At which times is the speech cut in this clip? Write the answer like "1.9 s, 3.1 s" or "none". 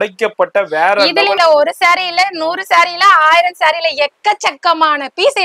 1.4 s